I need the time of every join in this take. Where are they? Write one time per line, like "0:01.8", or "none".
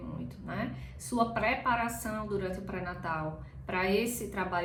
none

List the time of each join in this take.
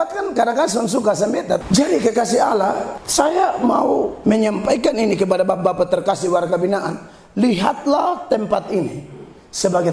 0:01.6
0:02.9
0:04.1

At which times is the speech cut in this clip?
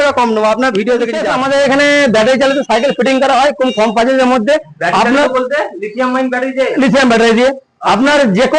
0:01.2

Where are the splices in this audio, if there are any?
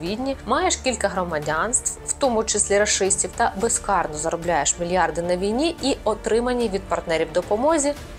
none

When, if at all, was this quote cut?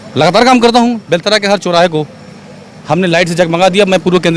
none

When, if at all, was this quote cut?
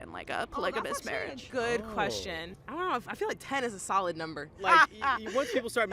0:02.5
0:04.6

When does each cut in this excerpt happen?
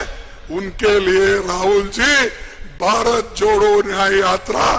none

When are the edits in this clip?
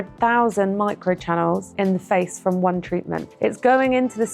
0:01.7
0:03.2

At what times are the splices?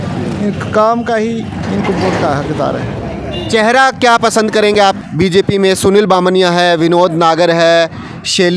0:05.0

